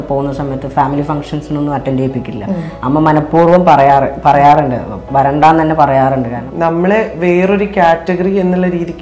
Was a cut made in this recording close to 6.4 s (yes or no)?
yes